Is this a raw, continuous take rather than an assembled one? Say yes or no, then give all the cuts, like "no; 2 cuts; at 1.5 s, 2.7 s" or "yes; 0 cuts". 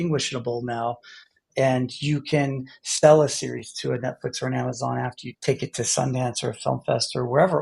no; 1 cut; at 5.3 s